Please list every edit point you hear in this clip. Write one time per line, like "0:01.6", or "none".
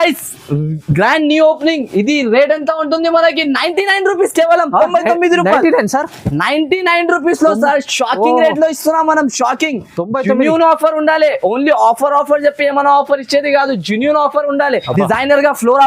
0:14.9